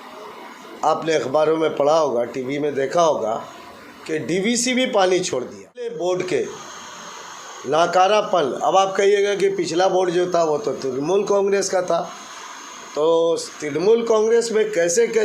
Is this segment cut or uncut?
cut